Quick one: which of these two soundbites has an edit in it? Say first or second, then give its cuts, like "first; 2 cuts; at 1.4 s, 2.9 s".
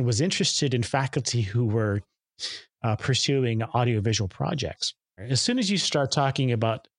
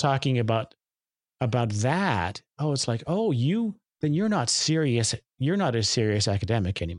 first; 1 cut; at 5.2 s